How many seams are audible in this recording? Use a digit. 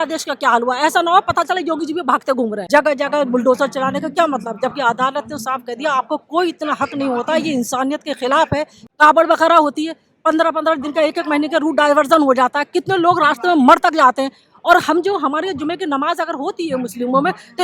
2